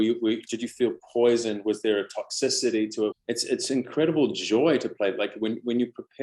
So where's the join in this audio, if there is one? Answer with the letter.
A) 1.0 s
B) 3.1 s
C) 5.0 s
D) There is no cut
B